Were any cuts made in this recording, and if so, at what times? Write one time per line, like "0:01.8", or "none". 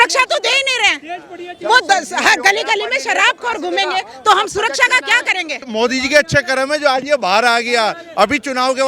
0:05.6